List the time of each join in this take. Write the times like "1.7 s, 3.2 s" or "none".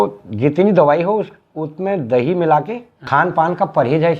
3.0 s